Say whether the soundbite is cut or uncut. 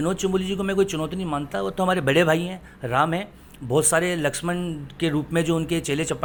uncut